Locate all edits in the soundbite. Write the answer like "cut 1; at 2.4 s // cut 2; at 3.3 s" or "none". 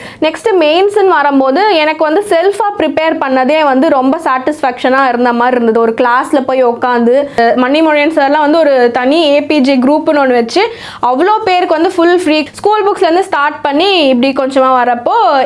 cut 1; at 7.4 s // cut 2; at 12.4 s